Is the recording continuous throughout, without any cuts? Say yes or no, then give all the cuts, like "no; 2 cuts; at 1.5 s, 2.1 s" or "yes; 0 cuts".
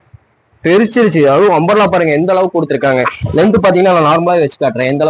yes; 0 cuts